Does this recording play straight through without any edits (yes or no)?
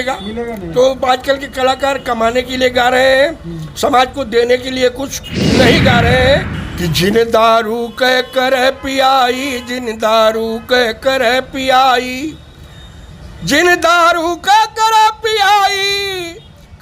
no